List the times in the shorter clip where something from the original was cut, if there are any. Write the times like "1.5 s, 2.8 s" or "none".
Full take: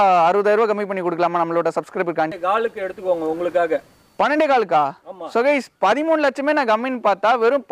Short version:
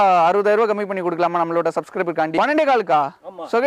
2.3 s